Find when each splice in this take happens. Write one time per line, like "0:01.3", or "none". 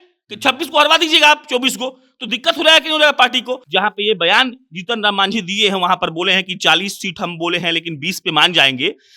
0:03.6